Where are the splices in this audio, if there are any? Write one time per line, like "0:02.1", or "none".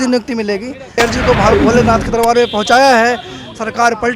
0:01.0